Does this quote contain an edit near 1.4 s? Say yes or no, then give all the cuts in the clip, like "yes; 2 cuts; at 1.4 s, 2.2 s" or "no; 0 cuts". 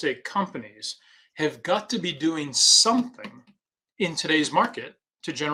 no; 0 cuts